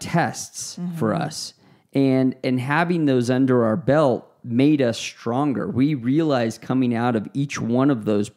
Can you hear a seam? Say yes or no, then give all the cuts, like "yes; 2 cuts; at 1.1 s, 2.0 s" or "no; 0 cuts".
no; 0 cuts